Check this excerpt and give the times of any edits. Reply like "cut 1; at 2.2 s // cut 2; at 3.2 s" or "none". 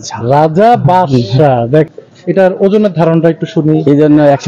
cut 1; at 1.9 s